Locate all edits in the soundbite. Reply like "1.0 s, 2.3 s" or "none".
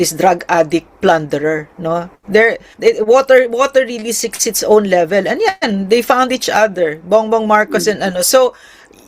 none

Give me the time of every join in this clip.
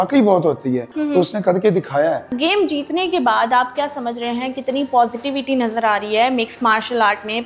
0.9 s, 2.3 s

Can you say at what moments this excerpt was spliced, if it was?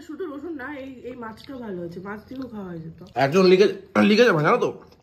3.0 s

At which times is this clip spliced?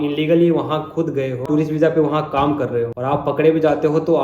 1.4 s, 2.9 s

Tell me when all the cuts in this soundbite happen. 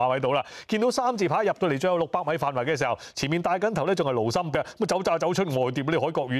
4.5 s

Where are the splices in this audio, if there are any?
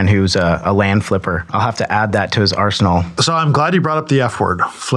1.5 s, 3.2 s

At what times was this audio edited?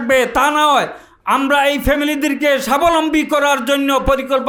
none

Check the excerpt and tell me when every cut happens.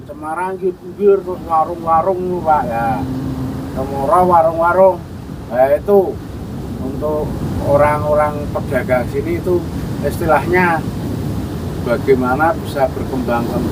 none

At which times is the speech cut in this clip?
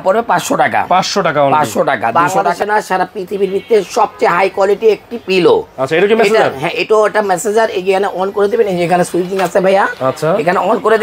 2.1 s

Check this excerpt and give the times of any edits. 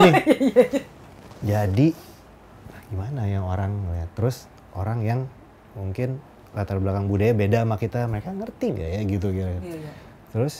none

